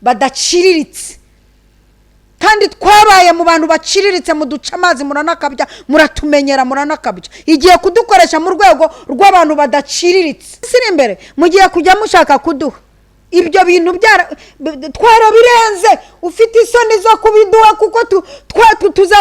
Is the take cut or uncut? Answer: cut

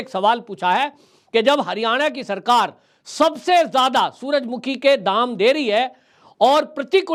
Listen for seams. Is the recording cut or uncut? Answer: uncut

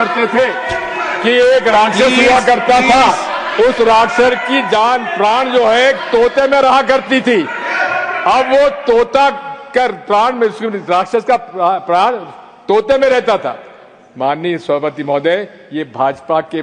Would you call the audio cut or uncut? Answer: uncut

